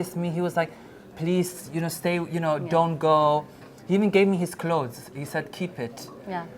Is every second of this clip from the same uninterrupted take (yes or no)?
yes